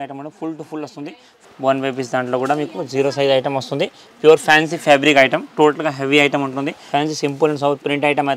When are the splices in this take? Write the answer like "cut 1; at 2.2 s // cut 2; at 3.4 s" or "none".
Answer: cut 1; at 1.4 s // cut 2; at 6.8 s